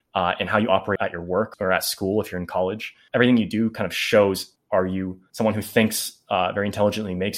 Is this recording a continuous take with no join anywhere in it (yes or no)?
no